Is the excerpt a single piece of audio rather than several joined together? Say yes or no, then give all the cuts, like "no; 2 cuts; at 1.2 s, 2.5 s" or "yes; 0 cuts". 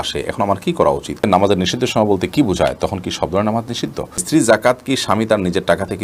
no; 2 cuts; at 1.2 s, 4.2 s